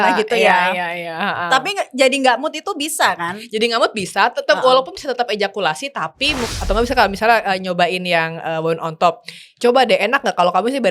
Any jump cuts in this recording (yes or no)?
yes